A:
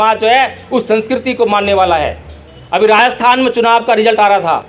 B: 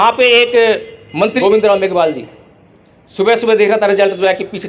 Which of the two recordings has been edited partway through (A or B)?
B